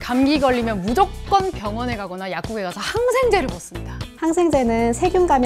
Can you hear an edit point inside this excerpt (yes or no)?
yes